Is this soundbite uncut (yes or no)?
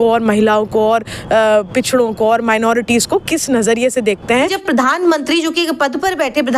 no